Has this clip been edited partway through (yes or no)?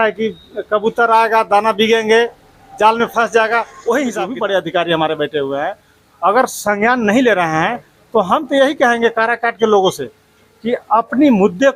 yes